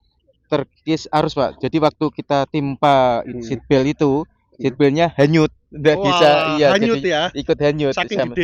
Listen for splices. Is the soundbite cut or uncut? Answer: uncut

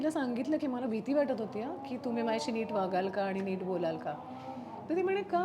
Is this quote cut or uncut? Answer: uncut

